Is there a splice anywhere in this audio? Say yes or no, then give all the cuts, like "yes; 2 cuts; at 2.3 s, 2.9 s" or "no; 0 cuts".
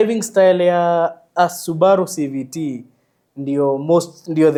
no; 0 cuts